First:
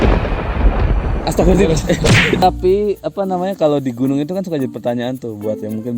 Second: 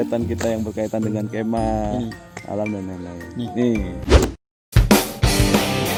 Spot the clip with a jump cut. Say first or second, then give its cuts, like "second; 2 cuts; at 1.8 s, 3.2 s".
first; 1 cut; at 2.4 s